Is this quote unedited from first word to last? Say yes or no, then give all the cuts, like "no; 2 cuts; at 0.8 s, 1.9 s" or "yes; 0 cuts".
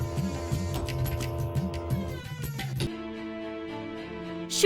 no; 1 cut; at 2.9 s